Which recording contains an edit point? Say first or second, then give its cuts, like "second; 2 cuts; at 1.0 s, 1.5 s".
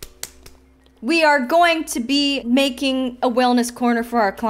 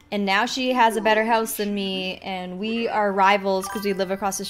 first; 1 cut; at 2.4 s